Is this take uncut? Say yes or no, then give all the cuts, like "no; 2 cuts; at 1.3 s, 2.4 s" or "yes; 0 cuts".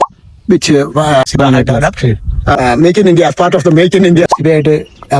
no; 2 cuts; at 2.6 s, 4.3 s